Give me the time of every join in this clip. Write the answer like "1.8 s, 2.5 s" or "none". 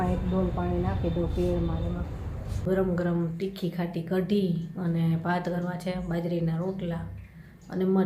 2.6 s